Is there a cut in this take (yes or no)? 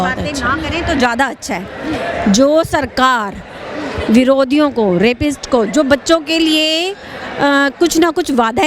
no